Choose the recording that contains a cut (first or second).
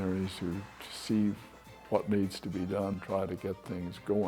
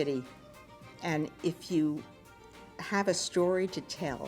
first